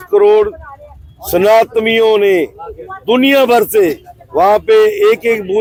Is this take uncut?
yes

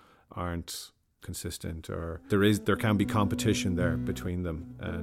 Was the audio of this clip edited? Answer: no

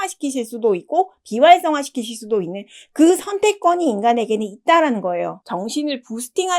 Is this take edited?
yes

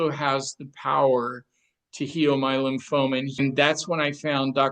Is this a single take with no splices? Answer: no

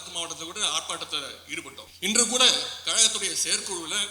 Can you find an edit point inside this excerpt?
yes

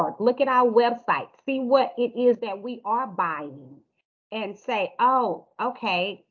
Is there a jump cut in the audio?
no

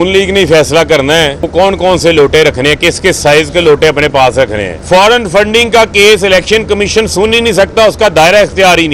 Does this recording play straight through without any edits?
no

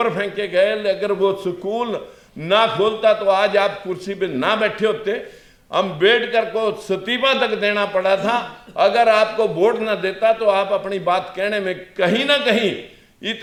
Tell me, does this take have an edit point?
no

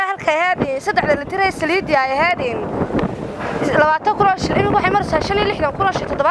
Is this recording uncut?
yes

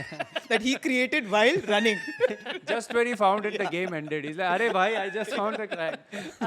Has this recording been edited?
no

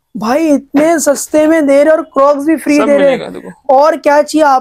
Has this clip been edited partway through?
no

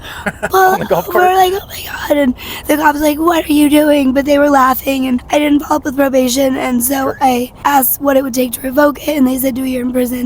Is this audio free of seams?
no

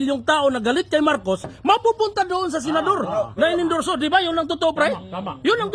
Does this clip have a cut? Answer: no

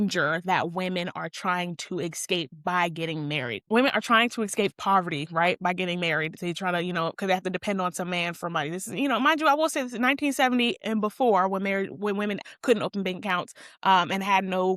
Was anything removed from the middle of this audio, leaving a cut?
yes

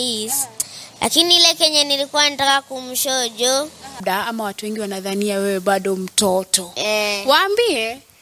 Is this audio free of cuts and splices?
no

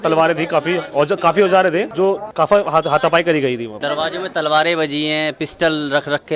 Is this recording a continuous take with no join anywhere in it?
no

